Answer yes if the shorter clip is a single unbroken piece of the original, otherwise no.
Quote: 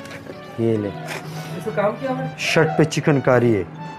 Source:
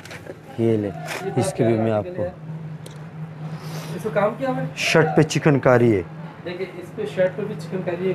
no